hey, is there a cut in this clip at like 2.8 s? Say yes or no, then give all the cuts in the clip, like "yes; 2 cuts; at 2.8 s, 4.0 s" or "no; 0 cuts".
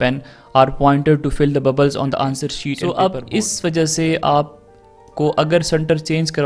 yes; 1 cut; at 2.8 s